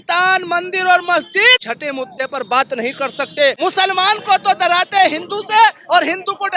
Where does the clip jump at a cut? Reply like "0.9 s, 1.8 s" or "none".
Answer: 1.7 s, 3.6 s